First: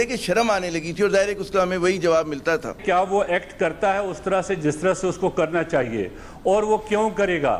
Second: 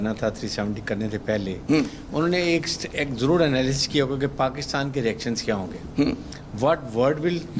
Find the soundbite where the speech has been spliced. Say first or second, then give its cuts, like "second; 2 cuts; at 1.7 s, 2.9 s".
first; 1 cut; at 2.8 s